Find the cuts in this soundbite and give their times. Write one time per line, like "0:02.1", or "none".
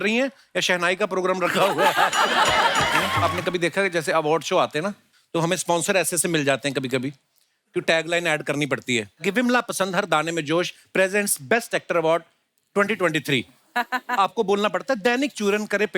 0:03.1